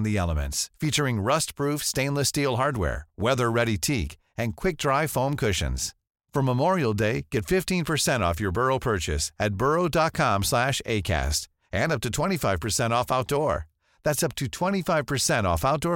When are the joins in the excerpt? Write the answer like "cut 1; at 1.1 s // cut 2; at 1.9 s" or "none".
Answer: none